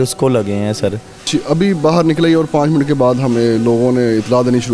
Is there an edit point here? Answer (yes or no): yes